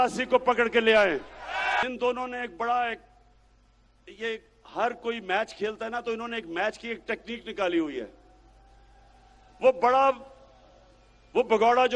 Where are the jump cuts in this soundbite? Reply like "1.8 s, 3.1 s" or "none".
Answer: 1.8 s